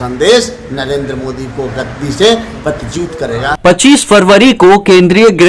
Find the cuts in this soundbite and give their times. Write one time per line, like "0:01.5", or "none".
none